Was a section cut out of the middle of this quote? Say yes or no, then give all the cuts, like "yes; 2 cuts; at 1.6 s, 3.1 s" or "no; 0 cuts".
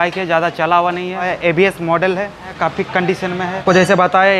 yes; 3 cuts; at 1.3 s, 2.5 s, 3.6 s